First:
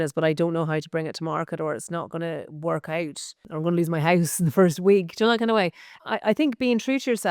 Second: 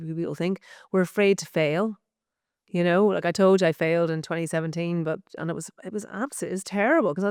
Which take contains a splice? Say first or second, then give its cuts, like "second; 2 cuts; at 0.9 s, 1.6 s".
first; 2 cuts; at 3.4 s, 5.9 s